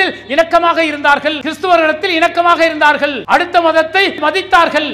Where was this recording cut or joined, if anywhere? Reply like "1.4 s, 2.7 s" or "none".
1.5 s, 3.2 s, 4.2 s